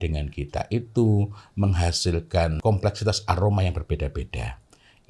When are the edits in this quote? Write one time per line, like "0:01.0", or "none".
0:02.6